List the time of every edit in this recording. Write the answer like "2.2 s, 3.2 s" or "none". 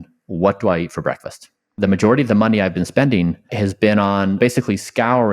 1.7 s, 3.5 s, 4.4 s